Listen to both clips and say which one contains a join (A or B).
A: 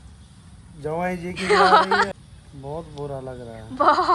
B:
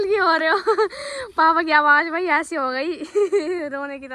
A